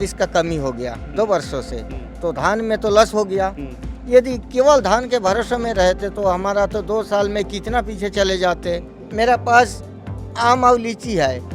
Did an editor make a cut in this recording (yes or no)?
yes